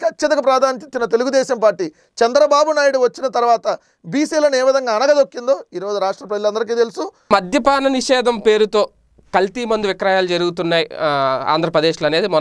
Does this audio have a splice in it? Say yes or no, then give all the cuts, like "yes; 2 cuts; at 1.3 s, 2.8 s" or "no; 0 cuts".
yes; 1 cut; at 7.3 s